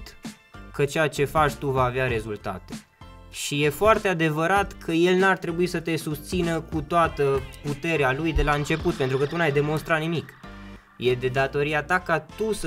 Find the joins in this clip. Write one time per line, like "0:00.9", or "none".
none